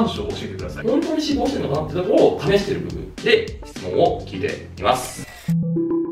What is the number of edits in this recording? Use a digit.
2